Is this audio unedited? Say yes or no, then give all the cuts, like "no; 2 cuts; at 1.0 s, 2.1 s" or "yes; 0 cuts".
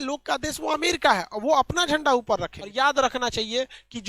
no; 1 cut; at 2.6 s